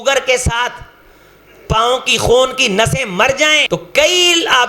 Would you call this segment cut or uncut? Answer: cut